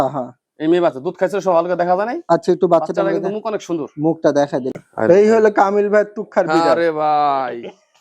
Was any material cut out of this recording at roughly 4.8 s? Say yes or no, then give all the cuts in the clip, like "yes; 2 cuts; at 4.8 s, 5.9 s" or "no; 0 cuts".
yes; 1 cut; at 4.8 s